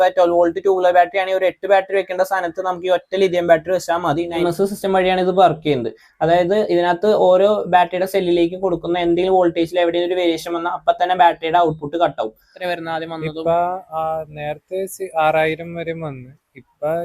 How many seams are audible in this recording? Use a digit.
2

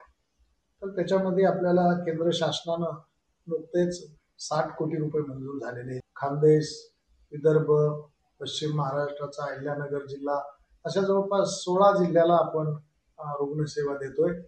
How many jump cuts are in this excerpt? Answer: 1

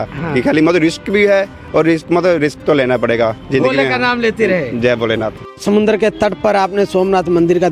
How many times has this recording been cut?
1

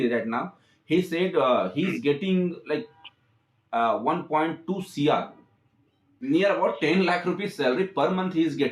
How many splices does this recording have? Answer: 1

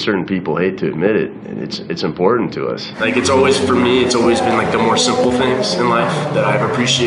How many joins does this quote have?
1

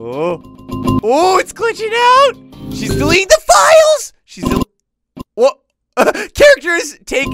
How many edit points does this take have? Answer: 0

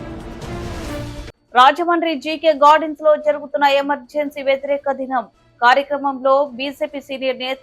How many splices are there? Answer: 1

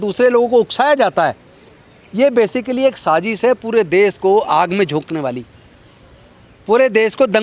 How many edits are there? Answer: 0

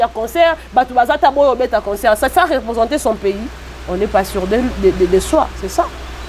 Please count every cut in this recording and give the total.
0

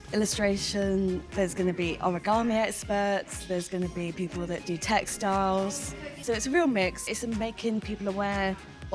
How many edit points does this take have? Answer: 3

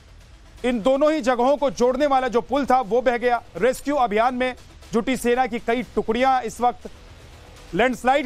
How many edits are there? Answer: 0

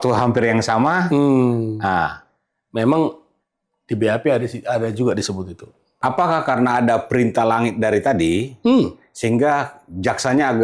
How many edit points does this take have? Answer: 1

